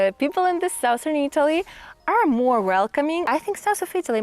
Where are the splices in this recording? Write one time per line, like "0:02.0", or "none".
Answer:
0:03.3